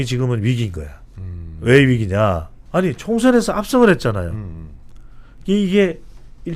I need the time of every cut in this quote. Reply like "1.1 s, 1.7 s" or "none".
2.5 s